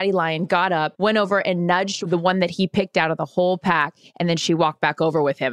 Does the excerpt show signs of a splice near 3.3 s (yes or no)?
no